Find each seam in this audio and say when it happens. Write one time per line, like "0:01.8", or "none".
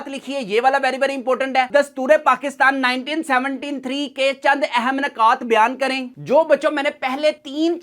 0:01.7
0:06.1